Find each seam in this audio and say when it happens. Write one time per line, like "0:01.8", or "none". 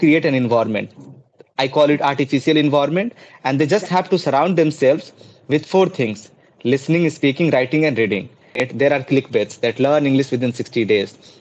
0:08.6